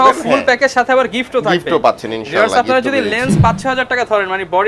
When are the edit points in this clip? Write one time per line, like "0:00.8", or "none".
none